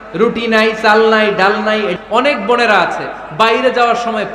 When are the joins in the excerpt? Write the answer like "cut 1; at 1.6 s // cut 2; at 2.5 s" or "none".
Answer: cut 1; at 1.9 s

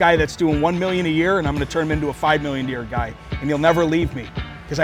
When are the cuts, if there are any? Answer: none

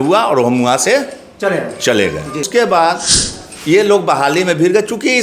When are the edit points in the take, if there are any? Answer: cut 1; at 2.5 s

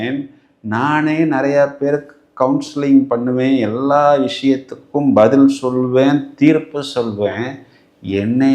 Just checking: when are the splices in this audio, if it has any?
none

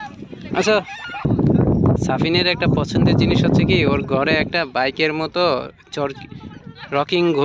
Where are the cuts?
cut 1; at 1.3 s

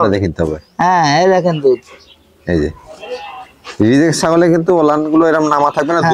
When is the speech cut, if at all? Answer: none

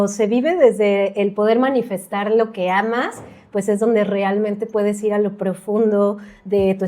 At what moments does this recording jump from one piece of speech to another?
none

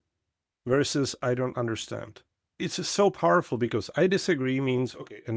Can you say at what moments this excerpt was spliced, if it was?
cut 1; at 2.4 s

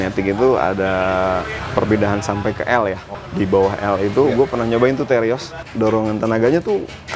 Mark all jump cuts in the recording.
cut 1; at 1.6 s // cut 2; at 3.1 s // cut 3; at 5.6 s

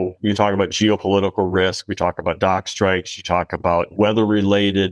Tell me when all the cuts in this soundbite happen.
cut 1; at 3.9 s

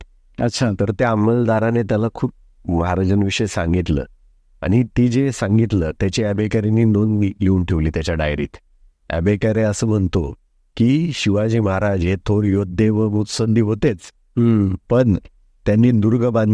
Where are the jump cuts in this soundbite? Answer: none

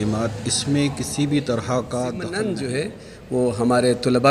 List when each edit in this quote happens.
cut 1; at 2.5 s

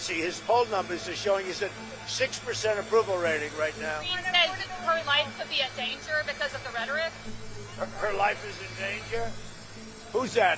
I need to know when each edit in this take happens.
cut 1; at 4.1 s

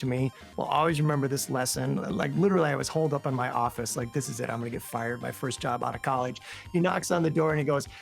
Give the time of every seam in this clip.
none

